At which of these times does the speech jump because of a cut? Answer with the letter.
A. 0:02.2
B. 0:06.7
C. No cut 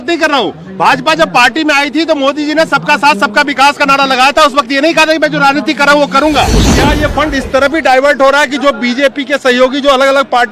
B